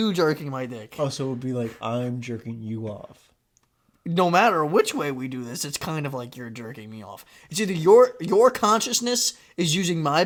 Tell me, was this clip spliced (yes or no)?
no